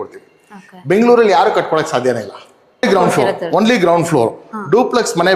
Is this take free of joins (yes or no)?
no